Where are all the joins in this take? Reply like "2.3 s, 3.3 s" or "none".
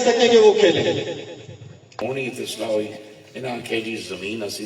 2.0 s